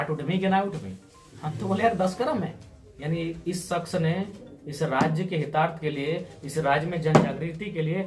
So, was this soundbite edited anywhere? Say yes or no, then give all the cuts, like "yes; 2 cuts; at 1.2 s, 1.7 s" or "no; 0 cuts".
no; 0 cuts